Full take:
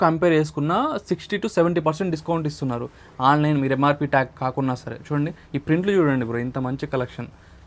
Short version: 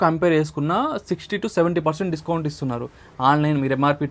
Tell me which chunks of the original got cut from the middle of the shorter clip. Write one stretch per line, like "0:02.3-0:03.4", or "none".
none